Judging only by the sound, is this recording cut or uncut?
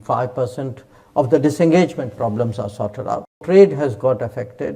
cut